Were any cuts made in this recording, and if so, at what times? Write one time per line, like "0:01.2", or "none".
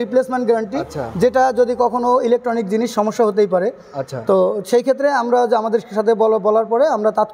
none